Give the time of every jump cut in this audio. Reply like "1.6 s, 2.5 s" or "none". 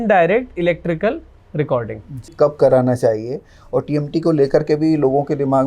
2.3 s